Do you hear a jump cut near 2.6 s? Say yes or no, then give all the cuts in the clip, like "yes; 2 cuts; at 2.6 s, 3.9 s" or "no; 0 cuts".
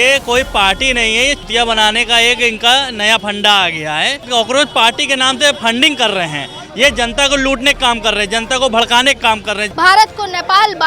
no; 2 cuts; at 4.2 s, 9.7 s